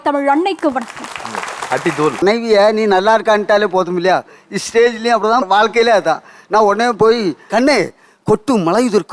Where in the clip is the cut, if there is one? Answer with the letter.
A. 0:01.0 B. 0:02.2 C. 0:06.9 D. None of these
B